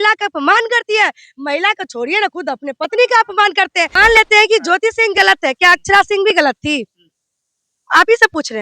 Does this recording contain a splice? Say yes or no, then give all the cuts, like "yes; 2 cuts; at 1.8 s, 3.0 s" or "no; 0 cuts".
yes; 1 cut; at 3.9 s